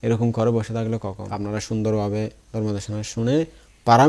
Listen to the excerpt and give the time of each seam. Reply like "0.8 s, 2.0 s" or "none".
1.3 s